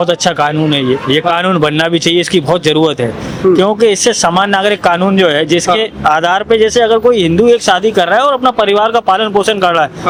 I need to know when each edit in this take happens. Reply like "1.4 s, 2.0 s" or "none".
none